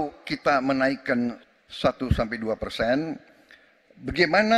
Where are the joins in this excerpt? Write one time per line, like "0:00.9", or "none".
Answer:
0:01.4